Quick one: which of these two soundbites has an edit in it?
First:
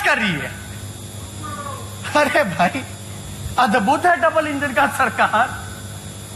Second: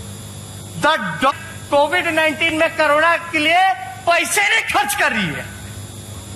second; 1 cut; at 1.3 s

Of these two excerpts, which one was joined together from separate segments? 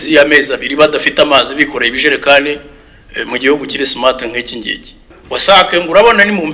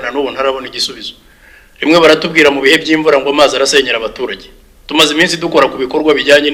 first; 1 cut; at 5.1 s

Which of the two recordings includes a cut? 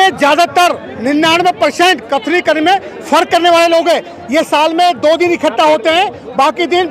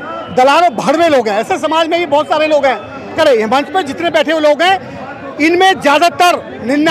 second; 1 cut; at 3.2 s

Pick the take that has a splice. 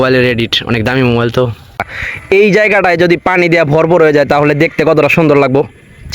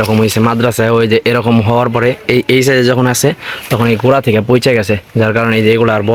first; 1 cut; at 1.8 s

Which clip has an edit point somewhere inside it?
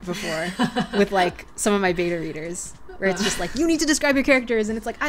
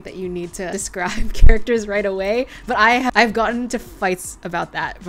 second; 1 cut; at 3.1 s

